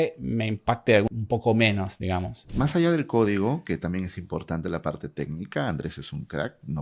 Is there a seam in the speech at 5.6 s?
no; 2 cuts; at 1.1 s, 2.5 s

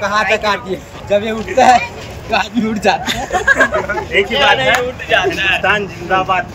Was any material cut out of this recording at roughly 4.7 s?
no; 1 cut; at 0.9 s

